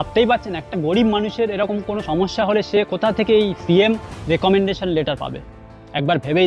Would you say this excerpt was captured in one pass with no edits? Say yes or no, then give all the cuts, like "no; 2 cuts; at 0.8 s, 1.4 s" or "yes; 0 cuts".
yes; 0 cuts